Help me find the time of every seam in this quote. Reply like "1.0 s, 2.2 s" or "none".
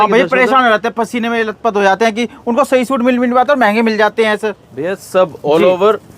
4.6 s